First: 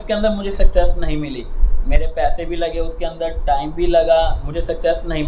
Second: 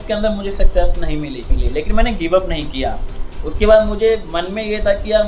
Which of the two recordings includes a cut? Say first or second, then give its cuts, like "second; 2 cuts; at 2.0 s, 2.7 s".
second; 1 cut; at 1.6 s